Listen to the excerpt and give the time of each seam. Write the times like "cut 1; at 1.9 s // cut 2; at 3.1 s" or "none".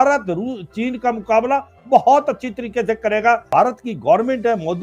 cut 1; at 3.5 s